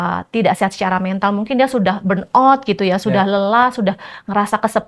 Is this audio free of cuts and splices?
yes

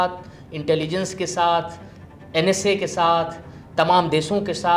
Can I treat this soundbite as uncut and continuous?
yes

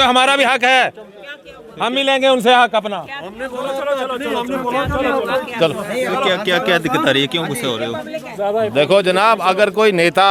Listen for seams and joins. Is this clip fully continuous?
yes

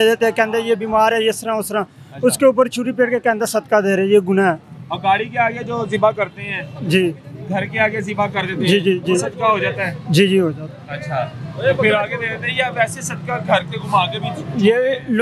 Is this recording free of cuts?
yes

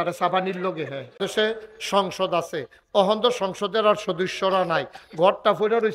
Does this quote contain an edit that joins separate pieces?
yes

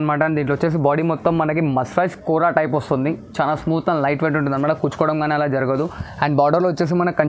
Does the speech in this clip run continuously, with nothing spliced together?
yes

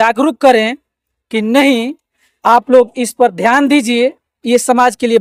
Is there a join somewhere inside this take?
no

